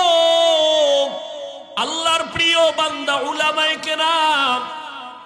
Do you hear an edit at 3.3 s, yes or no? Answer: no